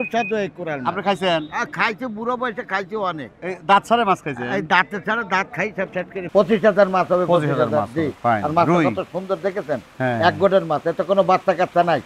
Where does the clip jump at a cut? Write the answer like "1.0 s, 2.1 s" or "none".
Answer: 6.2 s